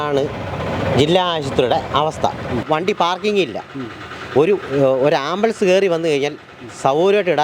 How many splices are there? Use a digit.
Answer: 1